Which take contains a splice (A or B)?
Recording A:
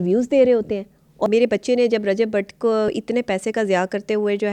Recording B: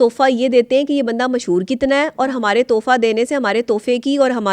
A